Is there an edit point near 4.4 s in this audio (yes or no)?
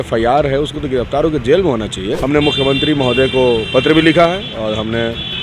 no